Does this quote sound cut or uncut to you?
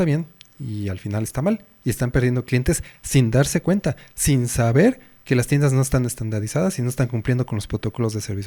uncut